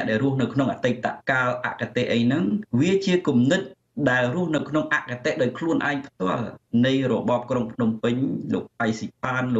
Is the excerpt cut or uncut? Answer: cut